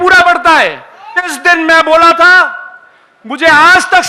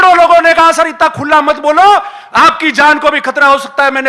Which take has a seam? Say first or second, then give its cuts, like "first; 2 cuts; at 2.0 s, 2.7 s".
first; 1 cut; at 1.4 s